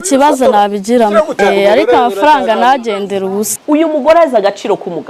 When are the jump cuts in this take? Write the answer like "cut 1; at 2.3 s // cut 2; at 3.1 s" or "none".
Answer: cut 1; at 1.4 s // cut 2; at 3.5 s